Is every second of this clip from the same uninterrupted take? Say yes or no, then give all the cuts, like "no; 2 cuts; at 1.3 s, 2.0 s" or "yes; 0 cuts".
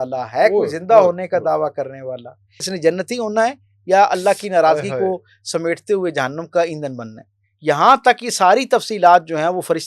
no; 1 cut; at 2.7 s